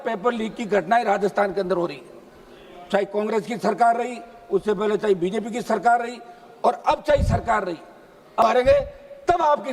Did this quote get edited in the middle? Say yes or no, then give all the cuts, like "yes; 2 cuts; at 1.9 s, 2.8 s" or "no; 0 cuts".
yes; 1 cut; at 8.4 s